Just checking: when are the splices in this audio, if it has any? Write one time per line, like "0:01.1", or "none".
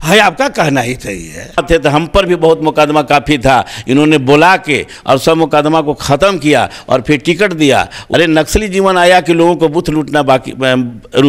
0:01.6
0:08.0